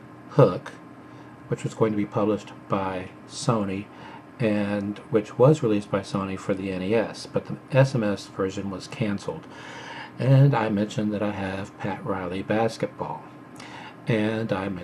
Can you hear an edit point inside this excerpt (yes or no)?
no